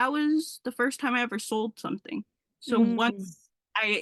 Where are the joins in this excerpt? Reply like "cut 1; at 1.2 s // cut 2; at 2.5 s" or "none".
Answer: none